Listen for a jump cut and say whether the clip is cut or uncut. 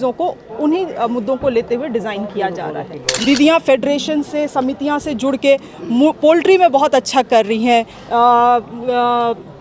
cut